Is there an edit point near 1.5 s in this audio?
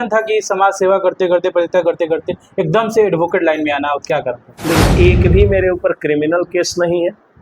no; 1 cut; at 4.8 s

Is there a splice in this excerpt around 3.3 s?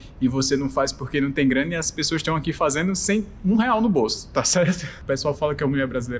no; 1 cut; at 5.0 s

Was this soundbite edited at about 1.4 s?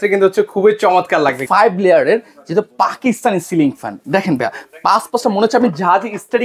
yes; 1 cut; at 1.4 s

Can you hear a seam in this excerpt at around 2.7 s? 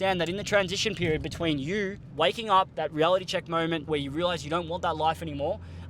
yes; 3 cuts; at 2.0 s, 2.7 s, 3.8 s

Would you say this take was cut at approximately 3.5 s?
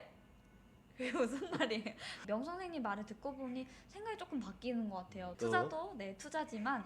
no; 2 cuts; at 2.2 s, 5.3 s

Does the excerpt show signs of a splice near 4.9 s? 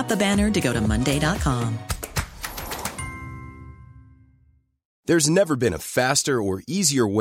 yes; 1 cut; at 4.9 s

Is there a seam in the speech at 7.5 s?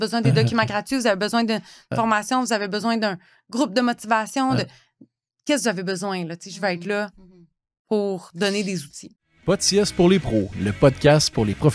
no; 1 cut; at 9.1 s

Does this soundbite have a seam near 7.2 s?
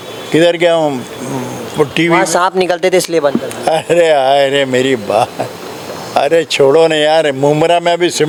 no; 0 cuts

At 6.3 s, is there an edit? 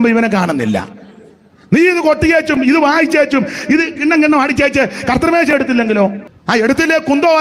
yes; 1 cut; at 6.3 s

